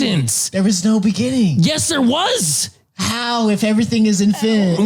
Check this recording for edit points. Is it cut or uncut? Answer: uncut